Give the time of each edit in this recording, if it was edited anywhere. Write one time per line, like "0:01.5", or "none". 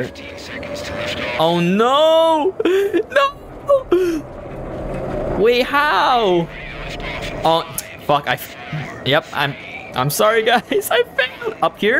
none